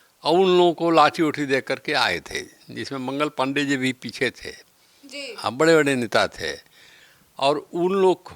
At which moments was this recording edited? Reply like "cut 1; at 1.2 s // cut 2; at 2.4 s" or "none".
none